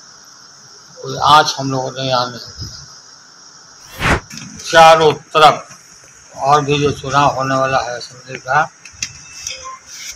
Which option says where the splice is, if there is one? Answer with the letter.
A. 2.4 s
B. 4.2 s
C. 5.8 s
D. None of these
B